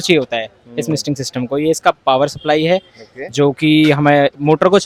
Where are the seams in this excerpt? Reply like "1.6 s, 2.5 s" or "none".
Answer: none